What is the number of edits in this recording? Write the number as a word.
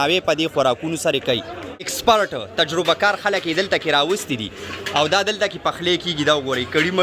one